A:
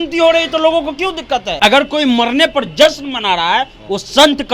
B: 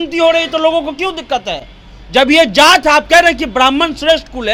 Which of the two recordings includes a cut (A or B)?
A